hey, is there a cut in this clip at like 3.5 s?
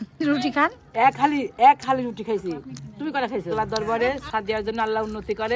yes; 1 cut; at 3.5 s

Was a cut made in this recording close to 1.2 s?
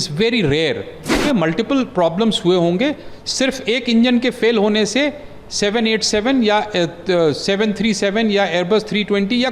yes; 1 cut; at 1.2 s

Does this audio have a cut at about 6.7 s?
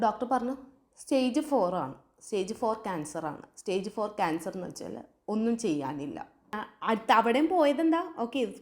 yes; 1 cut; at 6.7 s

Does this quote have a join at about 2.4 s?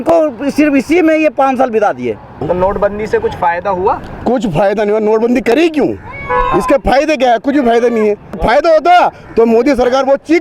yes; 2 cuts; at 2.4 s, 8.4 s

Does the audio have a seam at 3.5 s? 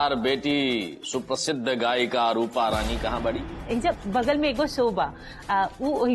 yes; 1 cut; at 3.5 s

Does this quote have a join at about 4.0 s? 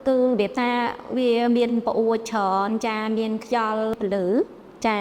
yes; 1 cut; at 4.0 s

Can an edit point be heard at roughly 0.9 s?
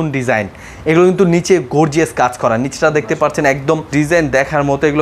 no; 1 cut; at 3.9 s

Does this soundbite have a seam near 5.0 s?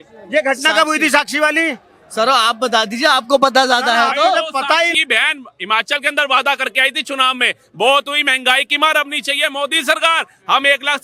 yes; 1 cut; at 5.0 s

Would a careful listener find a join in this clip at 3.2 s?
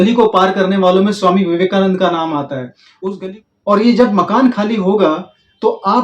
yes; 1 cut; at 3.2 s

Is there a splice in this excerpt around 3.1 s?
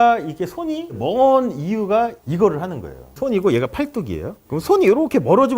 yes; 1 cut; at 3.1 s

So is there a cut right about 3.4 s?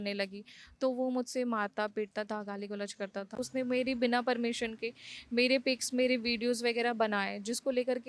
yes; 1 cut; at 3.4 s

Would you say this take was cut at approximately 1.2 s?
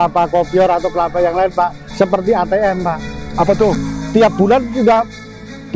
no; 0 cuts

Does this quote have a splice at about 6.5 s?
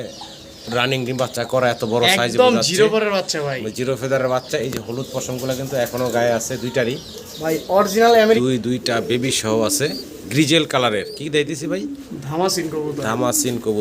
no; 1 cut; at 8.4 s

